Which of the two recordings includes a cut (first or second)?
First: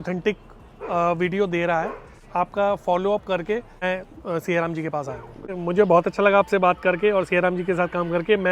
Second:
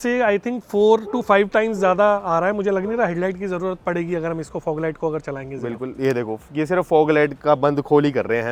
first